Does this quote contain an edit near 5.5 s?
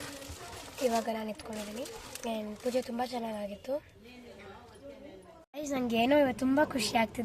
yes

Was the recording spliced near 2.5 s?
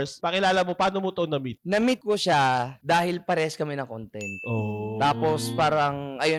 no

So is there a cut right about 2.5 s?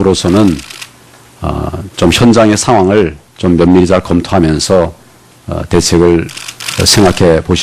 no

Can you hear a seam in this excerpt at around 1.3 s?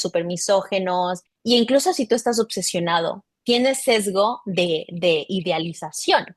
yes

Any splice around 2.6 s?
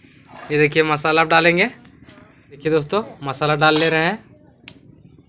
yes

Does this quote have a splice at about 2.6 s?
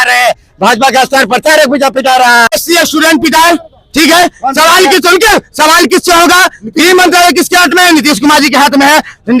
yes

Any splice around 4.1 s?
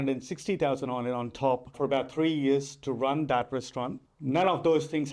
yes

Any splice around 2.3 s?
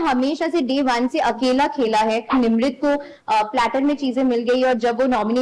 yes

